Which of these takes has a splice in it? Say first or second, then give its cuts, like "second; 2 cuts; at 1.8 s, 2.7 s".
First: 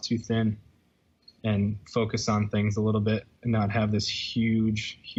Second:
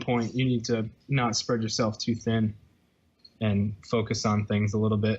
second; 1 cut; at 1.0 s